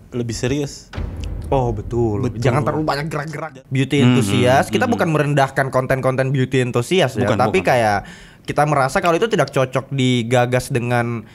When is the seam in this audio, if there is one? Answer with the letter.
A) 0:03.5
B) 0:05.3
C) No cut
A